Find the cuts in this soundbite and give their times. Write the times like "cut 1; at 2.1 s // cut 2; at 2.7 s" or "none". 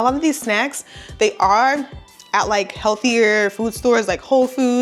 none